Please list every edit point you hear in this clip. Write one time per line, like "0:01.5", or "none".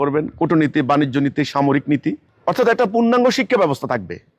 0:02.3